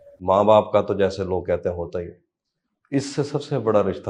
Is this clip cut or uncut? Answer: uncut